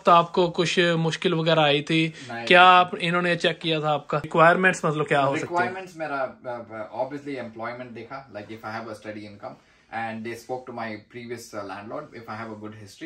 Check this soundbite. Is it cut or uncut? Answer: uncut